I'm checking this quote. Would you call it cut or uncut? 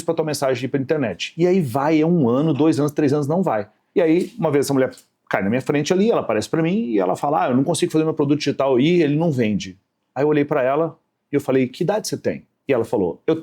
cut